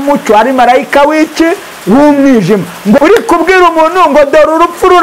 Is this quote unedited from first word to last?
no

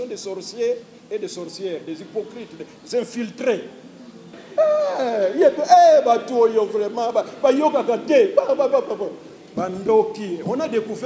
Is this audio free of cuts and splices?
no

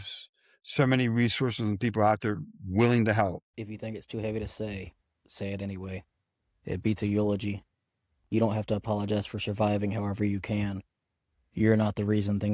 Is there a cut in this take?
yes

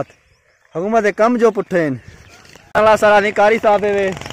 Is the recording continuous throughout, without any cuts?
no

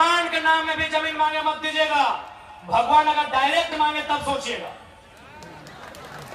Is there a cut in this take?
no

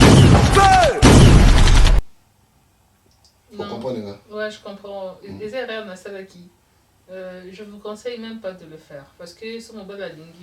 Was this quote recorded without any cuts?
no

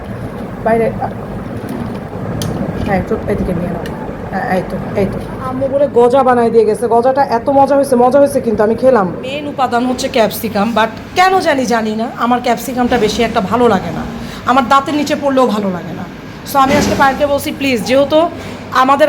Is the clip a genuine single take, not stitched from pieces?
no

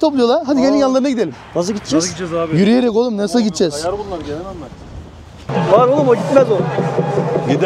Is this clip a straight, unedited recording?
no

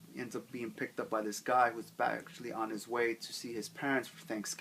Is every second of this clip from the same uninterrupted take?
no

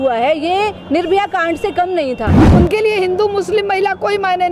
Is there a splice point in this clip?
yes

